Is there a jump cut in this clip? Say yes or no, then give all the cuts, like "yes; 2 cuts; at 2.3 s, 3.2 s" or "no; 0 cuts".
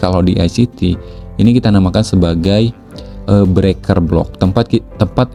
no; 0 cuts